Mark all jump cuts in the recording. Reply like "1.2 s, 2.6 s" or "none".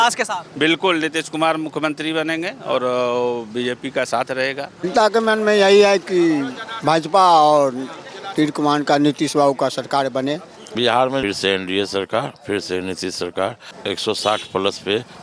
4.8 s, 10.7 s, 13.7 s